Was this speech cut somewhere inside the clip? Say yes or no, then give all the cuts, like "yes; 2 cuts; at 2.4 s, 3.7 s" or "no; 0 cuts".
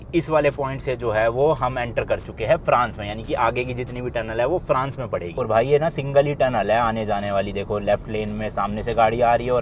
no; 0 cuts